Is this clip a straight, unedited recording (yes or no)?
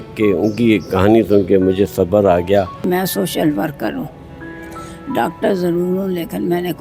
no